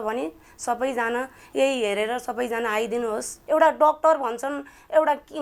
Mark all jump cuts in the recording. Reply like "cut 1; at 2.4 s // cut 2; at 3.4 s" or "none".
cut 1; at 3.3 s